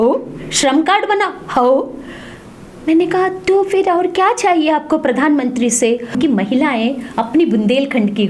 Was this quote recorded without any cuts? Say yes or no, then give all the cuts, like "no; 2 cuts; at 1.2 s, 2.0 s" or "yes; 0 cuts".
no; 1 cut; at 6.2 s